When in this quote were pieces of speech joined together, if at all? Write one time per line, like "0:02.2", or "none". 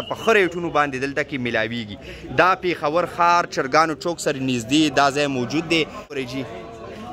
0:06.2